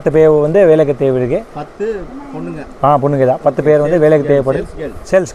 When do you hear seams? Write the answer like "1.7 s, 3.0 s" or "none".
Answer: none

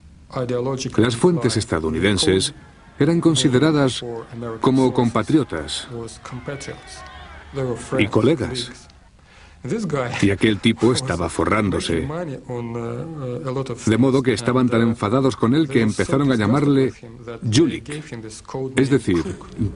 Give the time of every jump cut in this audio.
18.7 s

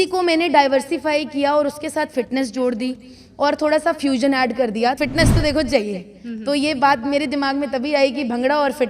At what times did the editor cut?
5.0 s

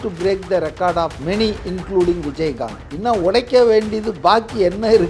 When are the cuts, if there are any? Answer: 1.2 s, 2.9 s

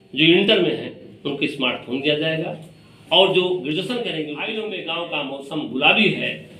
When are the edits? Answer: 4.4 s

